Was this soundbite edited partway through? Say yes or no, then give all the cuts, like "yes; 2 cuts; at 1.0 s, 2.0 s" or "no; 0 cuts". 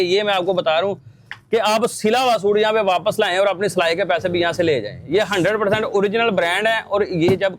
no; 0 cuts